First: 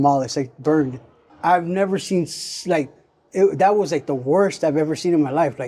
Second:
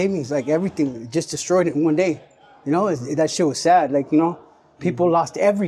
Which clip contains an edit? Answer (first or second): first